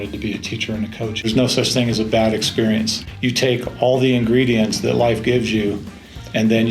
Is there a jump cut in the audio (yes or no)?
yes